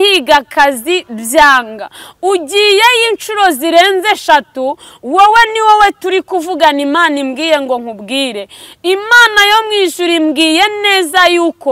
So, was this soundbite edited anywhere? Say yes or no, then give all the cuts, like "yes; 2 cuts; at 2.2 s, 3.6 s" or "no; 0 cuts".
no; 0 cuts